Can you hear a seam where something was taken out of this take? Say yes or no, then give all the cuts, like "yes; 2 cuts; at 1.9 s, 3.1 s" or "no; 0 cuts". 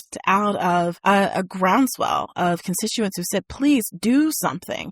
yes; 1 cut; at 1.0 s